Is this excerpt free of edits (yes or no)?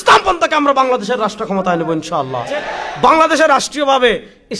no